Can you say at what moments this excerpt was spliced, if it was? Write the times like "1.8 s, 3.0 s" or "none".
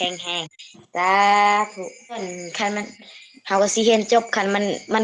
2.2 s